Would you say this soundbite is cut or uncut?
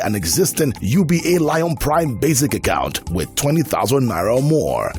uncut